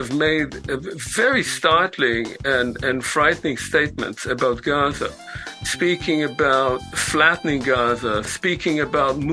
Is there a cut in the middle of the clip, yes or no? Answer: yes